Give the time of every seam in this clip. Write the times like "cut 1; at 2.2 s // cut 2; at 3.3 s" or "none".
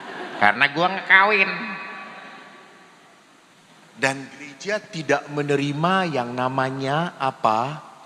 cut 1; at 3.6 s